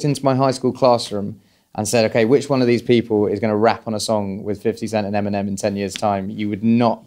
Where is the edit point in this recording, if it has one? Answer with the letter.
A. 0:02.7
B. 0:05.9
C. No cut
C